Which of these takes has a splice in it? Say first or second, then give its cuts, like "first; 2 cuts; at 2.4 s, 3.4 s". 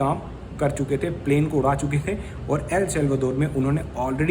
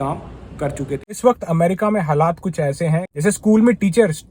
second; 2 cuts; at 1.0 s, 3.1 s